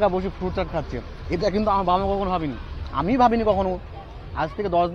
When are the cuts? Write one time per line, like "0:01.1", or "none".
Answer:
none